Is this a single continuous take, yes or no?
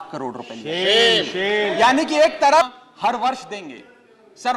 no